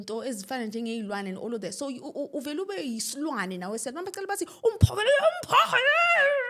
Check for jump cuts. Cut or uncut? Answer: uncut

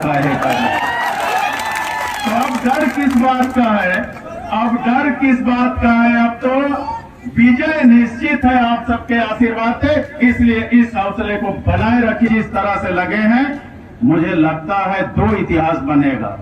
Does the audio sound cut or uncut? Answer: cut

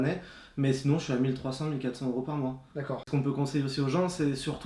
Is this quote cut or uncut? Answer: cut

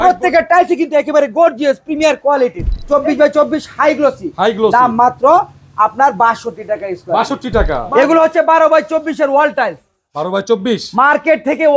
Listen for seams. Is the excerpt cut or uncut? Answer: cut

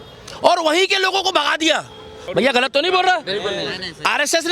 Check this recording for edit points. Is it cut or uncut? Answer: cut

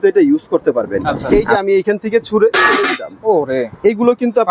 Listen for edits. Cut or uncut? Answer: cut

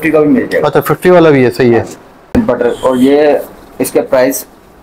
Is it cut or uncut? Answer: cut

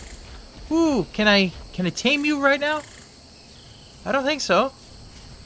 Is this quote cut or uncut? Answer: uncut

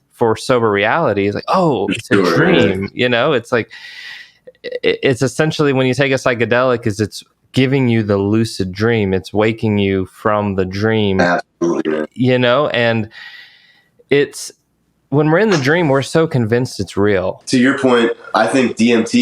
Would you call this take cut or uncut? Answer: cut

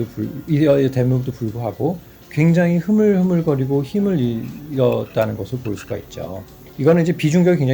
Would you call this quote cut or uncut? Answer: cut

